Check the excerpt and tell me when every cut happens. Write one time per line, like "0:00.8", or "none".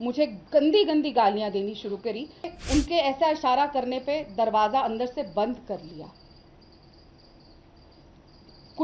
0:02.5